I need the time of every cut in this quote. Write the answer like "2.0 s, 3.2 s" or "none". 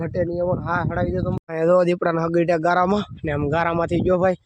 1.6 s